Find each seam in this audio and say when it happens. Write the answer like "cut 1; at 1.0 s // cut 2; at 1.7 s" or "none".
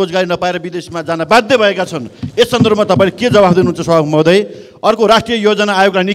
none